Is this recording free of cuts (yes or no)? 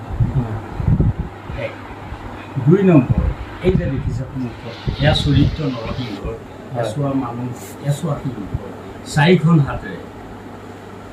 yes